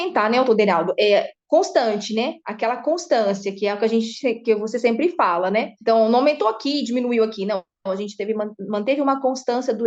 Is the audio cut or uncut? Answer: uncut